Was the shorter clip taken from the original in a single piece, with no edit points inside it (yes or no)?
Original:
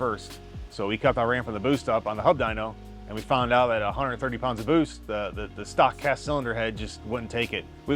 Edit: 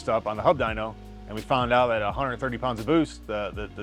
yes